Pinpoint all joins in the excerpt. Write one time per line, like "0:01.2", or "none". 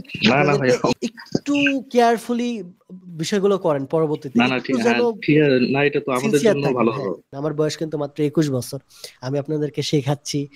0:01.0
0:07.3